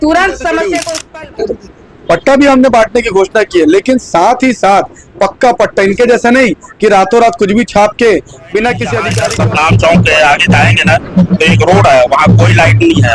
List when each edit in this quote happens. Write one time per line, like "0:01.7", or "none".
0:00.8
0:09.0